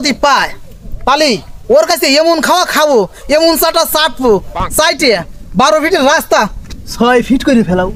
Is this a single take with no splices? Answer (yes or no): yes